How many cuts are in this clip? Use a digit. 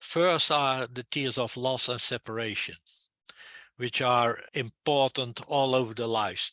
1